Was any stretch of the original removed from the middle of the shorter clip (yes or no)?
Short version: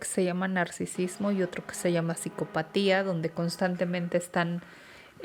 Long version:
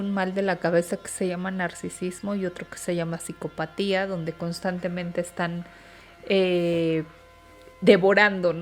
no